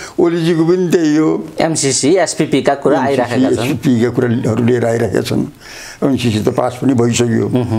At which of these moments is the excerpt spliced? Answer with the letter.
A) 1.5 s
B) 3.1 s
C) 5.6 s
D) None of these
A